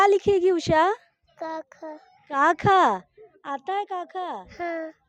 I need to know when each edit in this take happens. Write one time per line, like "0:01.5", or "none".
none